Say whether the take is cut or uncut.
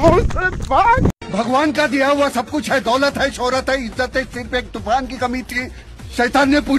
cut